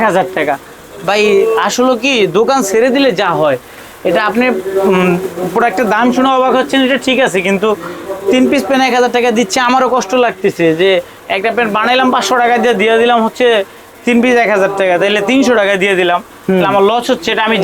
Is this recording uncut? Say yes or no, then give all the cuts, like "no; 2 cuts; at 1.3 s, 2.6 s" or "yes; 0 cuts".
yes; 0 cuts